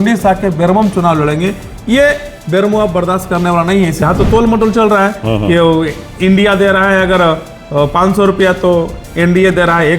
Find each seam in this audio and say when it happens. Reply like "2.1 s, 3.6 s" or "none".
4.0 s